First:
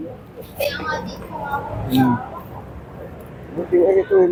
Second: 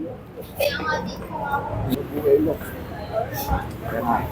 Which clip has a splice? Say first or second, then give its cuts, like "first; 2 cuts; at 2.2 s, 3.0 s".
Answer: second; 1 cut; at 1.9 s